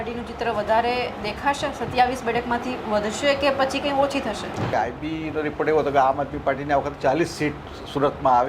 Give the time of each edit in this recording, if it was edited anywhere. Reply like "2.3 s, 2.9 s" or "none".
4.7 s